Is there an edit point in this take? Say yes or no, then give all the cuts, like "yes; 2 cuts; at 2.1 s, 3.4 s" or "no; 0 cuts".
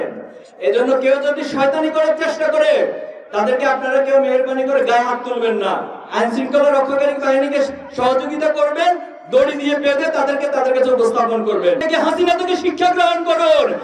yes; 1 cut; at 11.8 s